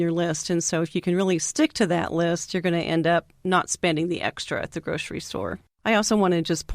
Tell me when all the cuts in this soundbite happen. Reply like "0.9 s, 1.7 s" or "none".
5.6 s